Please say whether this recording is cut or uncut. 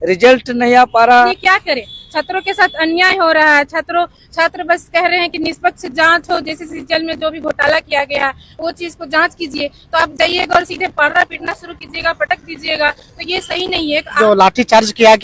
cut